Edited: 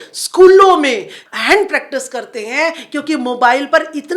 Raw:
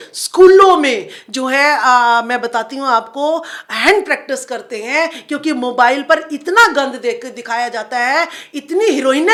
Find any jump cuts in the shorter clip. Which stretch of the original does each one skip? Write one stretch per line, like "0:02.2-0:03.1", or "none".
0:01.2-0:03.6